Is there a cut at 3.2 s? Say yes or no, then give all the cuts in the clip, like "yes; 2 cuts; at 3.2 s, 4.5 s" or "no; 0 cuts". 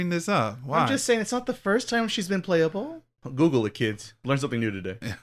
yes; 1 cut; at 3.2 s